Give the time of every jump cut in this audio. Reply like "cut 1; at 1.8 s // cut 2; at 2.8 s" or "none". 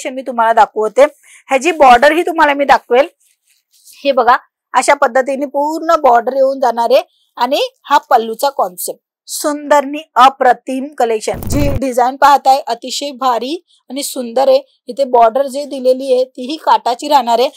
cut 1; at 11.4 s

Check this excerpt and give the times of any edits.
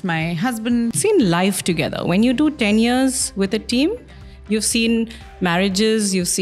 cut 1; at 0.9 s

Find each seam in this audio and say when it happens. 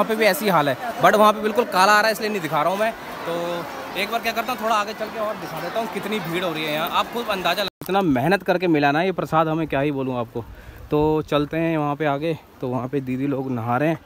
cut 1; at 7.8 s

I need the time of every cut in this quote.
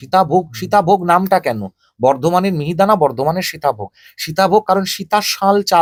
none

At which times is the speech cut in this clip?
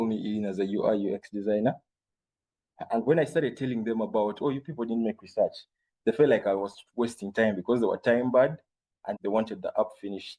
none

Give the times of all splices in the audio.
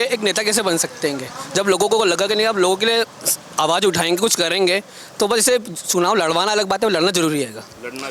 none

